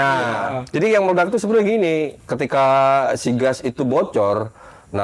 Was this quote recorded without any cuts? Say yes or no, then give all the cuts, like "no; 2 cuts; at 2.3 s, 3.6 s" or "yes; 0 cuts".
yes; 0 cuts